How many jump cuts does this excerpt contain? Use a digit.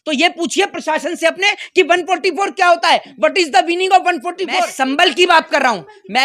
1